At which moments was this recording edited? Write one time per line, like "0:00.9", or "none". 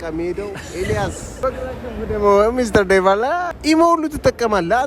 0:01.3
0:03.5